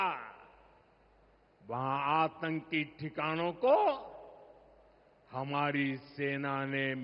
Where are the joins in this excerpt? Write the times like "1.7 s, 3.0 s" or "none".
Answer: none